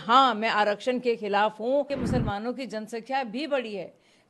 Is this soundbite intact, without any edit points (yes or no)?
no